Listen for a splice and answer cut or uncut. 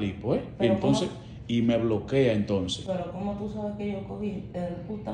uncut